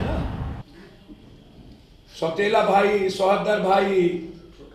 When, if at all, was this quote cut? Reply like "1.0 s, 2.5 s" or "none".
none

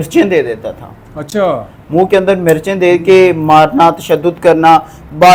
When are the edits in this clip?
none

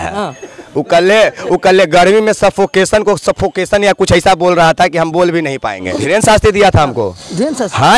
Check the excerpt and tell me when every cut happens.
5.9 s

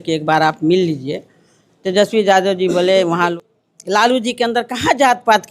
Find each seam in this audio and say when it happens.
3.3 s

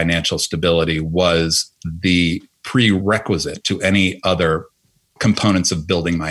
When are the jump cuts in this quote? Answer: 3.0 s

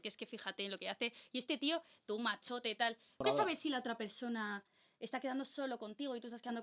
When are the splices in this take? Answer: 3.2 s

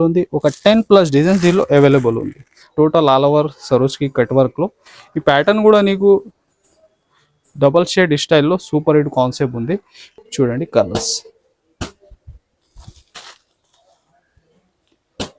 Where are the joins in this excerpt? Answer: 2.6 s, 10.0 s

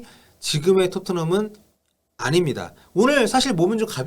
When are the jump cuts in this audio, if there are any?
2.8 s

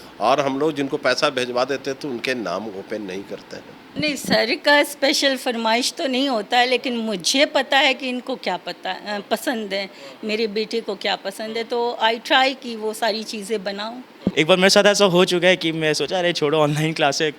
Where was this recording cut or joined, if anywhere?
3.8 s, 14.3 s

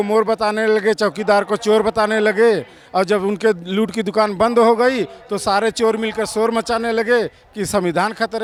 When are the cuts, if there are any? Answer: none

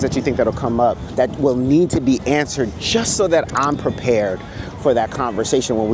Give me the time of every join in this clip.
1.0 s

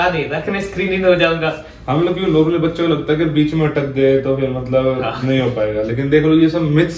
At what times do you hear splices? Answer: none

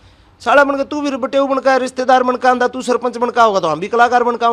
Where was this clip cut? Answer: none

